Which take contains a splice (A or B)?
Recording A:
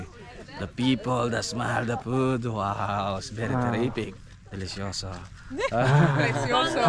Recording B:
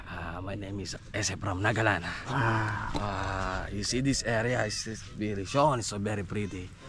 B